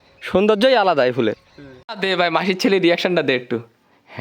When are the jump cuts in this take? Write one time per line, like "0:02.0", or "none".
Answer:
0:01.9